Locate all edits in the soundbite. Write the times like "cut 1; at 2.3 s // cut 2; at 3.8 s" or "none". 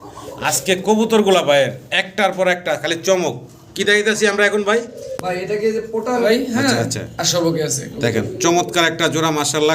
cut 1; at 6.2 s